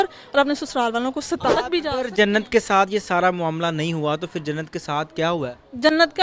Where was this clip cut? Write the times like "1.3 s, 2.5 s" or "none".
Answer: 1.6 s